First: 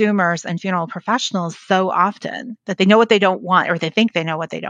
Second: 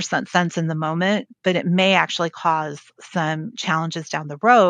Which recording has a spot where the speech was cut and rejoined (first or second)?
first